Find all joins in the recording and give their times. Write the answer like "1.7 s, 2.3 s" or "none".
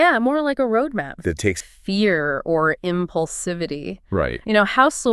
1.7 s